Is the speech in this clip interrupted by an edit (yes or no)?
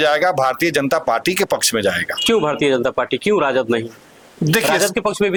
no